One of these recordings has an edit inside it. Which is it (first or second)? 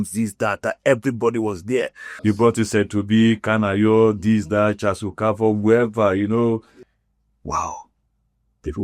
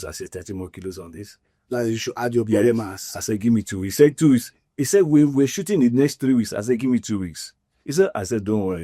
first